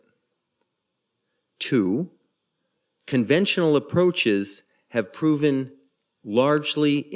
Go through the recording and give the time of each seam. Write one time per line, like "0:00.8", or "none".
none